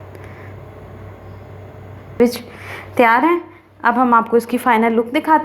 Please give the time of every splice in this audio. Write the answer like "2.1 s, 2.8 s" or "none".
2.2 s

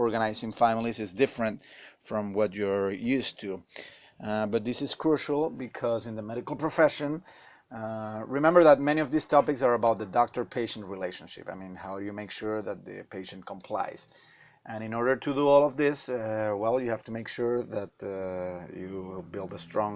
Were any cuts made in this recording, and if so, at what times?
5.3 s

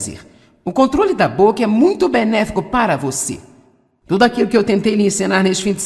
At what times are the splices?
1.4 s

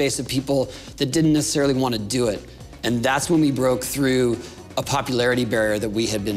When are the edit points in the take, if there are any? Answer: none

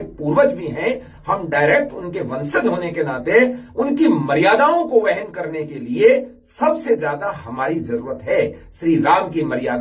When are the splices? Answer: none

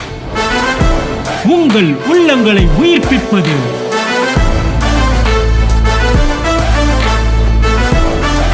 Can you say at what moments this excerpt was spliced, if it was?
none

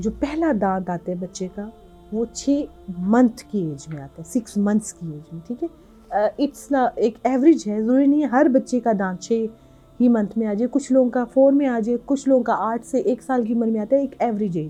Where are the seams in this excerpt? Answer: none

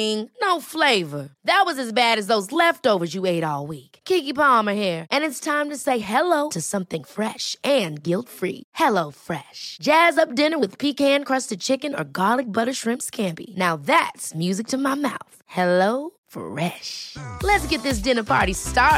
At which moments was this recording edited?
none

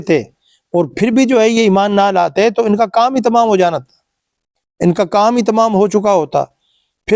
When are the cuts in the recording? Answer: none

